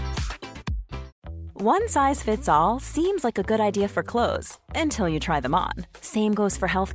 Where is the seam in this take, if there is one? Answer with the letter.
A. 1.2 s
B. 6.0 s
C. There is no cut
A